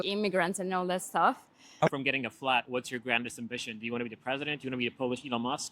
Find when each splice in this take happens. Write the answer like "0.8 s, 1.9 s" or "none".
1.6 s